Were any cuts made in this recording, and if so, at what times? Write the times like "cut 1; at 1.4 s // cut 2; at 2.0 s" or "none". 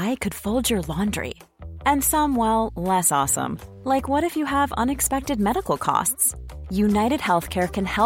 none